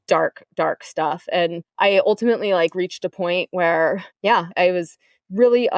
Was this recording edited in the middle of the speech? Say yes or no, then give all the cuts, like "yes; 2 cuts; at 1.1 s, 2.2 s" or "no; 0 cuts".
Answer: yes; 1 cut; at 1.6 s